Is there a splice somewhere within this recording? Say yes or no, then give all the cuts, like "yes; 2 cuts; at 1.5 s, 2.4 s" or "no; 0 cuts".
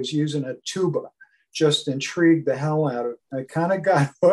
yes; 1 cut; at 3.2 s